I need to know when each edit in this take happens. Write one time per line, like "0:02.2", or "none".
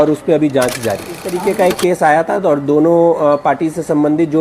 0:01.3